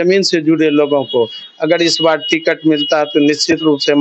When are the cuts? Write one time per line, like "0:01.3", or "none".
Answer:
none